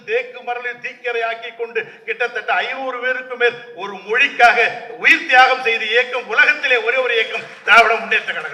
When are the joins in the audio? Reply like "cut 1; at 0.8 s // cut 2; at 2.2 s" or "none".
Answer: none